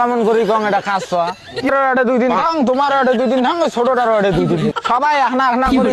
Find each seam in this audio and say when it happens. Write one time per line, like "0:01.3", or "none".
0:01.7
0:04.7